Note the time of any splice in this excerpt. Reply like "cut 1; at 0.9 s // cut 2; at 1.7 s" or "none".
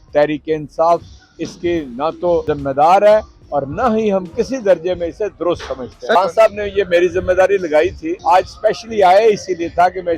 cut 1; at 2.4 s // cut 2; at 6.1 s // cut 3; at 8.1 s